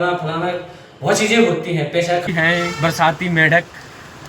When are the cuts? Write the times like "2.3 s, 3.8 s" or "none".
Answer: 2.3 s